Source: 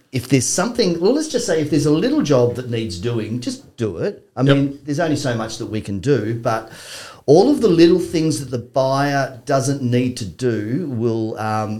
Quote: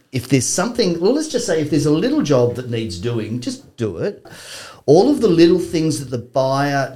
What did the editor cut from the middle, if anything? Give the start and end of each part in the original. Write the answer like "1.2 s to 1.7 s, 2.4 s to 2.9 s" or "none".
4.3 s to 6.7 s